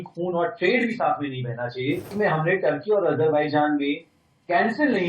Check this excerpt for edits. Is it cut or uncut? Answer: cut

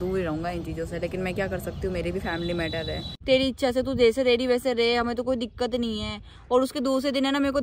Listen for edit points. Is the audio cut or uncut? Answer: cut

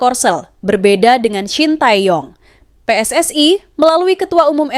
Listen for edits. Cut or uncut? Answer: uncut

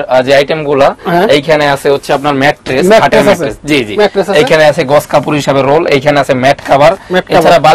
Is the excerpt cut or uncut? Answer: uncut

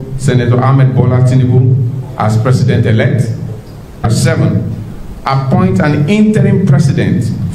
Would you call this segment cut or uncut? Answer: cut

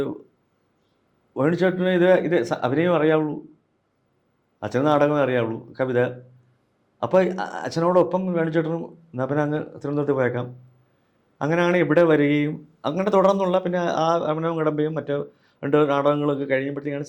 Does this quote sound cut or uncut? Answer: uncut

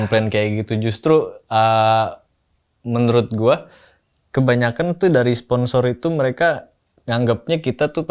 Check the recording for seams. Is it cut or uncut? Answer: uncut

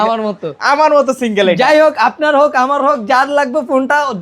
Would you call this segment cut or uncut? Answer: uncut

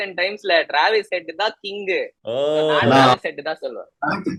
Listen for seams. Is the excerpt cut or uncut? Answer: uncut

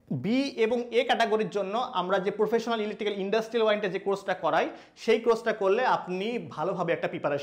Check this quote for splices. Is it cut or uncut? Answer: uncut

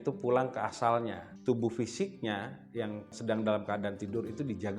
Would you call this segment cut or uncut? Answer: cut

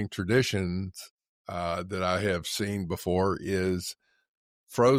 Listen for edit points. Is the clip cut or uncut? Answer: uncut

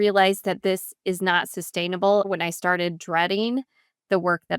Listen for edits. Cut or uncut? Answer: cut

